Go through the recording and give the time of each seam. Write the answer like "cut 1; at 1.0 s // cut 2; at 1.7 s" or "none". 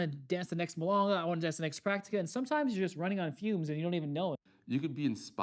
cut 1; at 4.5 s